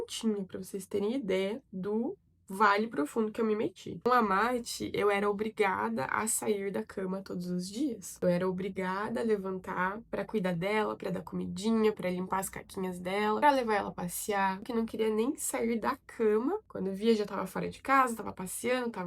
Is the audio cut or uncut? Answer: uncut